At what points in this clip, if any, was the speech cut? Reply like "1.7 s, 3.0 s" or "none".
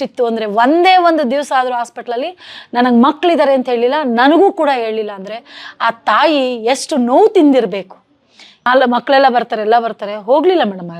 8.7 s